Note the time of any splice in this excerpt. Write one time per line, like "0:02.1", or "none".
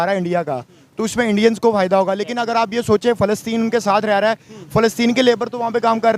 none